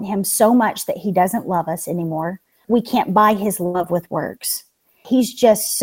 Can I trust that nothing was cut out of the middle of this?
no; 2 cuts; at 2.6 s, 4.9 s

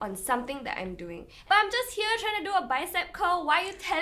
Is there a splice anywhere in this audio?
yes; 1 cut; at 1.3 s

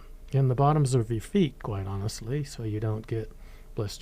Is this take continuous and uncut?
yes; 0 cuts

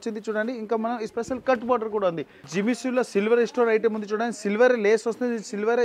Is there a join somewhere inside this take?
yes; 1 cut; at 2.5 s

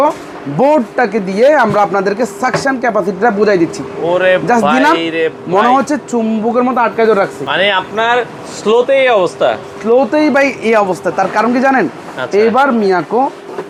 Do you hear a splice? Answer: no; 0 cuts

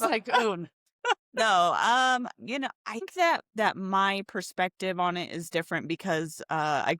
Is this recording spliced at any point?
yes; 1 cut; at 3.1 s

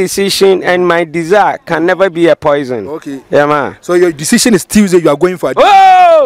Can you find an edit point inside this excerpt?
no; 0 cuts

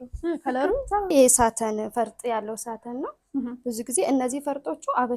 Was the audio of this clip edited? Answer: yes; 1 cut; at 1.1 s

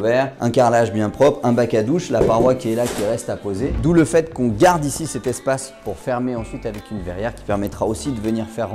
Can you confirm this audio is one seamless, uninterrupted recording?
no; 1 cut; at 3.8 s

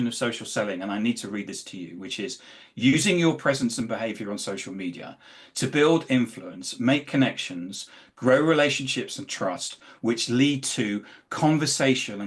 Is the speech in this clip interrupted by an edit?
no; 0 cuts

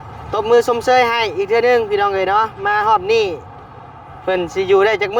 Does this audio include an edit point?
no; 0 cuts

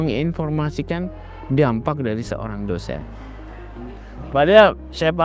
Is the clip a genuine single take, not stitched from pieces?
yes; 0 cuts

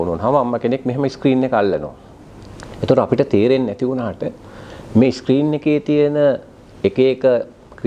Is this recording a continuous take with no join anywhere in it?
yes; 0 cuts

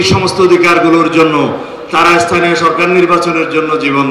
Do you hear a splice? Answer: no; 0 cuts

